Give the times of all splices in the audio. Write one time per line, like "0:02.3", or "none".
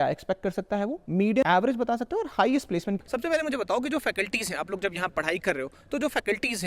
0:01.4
0:03.0